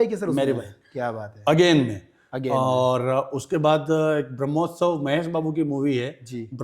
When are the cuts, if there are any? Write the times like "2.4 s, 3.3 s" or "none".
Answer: none